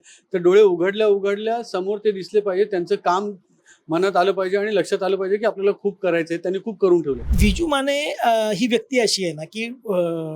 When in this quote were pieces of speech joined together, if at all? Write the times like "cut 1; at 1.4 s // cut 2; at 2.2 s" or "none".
cut 1; at 7.3 s

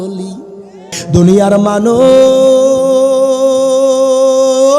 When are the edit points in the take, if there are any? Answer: cut 1; at 1.0 s

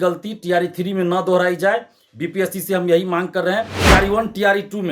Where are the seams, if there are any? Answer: cut 1; at 3.7 s

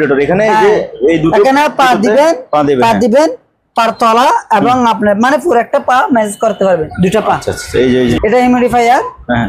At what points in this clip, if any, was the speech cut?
cut 1; at 8.2 s

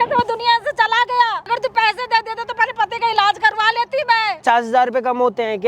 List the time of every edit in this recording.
cut 1; at 1.5 s // cut 2; at 4.4 s

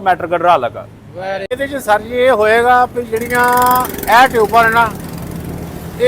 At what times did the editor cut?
cut 1; at 1.6 s

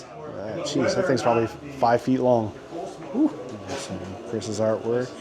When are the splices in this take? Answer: cut 1; at 3.5 s

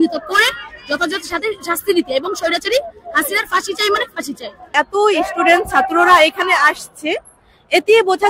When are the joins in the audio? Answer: cut 1; at 4.7 s

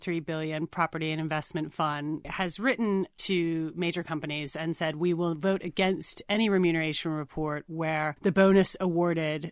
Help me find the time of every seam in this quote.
cut 1; at 2.3 s // cut 2; at 3.2 s // cut 3; at 8.2 s

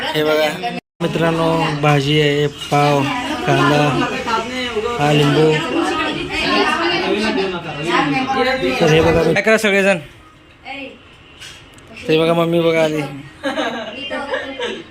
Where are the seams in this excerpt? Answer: cut 1; at 0.9 s // cut 2; at 9.4 s

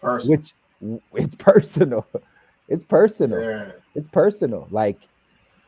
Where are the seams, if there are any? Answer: none

